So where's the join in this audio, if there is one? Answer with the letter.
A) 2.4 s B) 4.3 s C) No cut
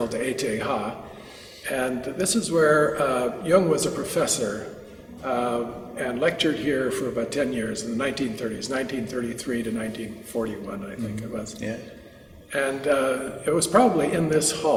C